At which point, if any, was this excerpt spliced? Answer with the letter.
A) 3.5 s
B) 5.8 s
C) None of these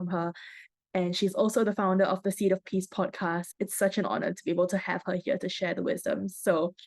A